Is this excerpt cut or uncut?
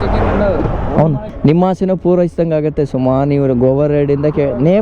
cut